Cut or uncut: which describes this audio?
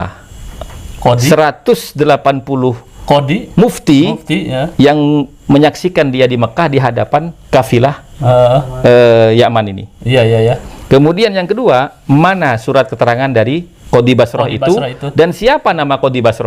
uncut